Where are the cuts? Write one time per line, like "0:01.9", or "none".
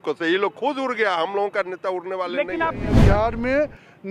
0:03.0